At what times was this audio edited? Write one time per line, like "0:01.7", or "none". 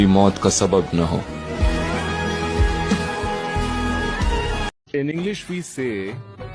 0:04.8